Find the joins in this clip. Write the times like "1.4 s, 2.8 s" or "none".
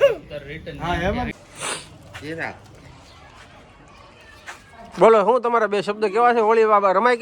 1.3 s